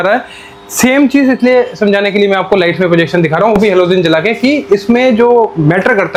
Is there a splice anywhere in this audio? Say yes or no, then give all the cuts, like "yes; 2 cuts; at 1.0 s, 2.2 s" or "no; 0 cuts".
no; 0 cuts